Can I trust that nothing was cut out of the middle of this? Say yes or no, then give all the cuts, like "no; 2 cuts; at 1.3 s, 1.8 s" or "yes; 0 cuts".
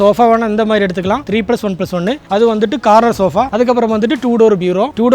no; 2 cuts; at 1.2 s, 3.5 s